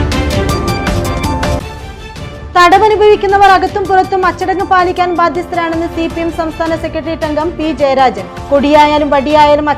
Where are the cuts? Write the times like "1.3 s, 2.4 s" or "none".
1.5 s